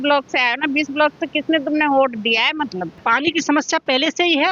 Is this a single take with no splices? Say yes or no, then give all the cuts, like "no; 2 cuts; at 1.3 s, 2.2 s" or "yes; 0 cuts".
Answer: no; 1 cut; at 2.9 s